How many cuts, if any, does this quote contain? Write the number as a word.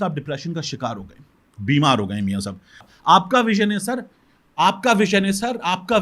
one